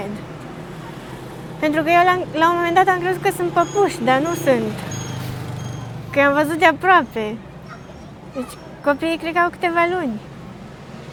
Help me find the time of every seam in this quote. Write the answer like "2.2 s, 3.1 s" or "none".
none

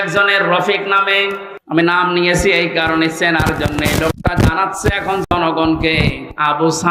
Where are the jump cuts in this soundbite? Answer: 1.5 s

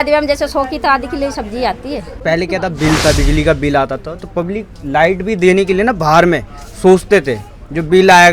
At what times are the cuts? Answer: 2.1 s

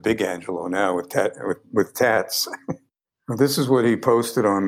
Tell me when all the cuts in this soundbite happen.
2.6 s

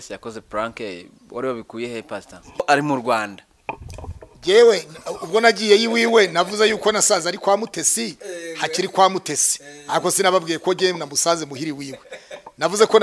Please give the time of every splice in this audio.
2.6 s

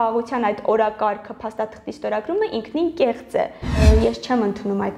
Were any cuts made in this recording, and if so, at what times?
3.8 s

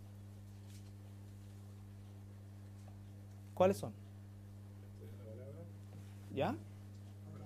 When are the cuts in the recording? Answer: 1.8 s

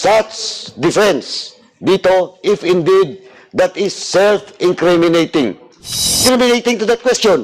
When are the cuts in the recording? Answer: 6.2 s

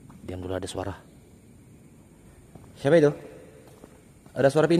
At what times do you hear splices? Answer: 2.3 s

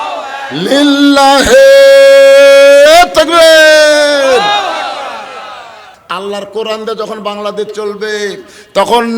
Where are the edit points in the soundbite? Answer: 5.8 s

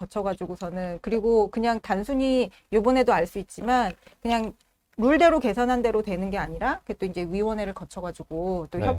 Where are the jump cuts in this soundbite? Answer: none

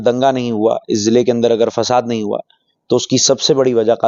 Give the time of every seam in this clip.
none

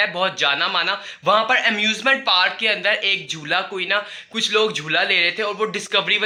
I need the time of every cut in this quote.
none

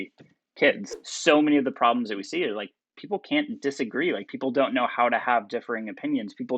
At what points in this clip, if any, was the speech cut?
0.9 s

